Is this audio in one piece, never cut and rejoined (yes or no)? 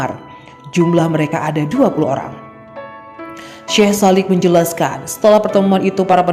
no